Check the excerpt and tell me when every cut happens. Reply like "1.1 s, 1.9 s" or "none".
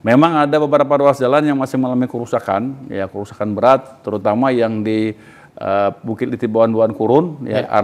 none